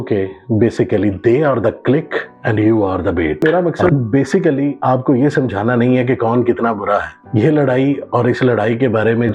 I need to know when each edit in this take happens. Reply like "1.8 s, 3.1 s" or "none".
3.4 s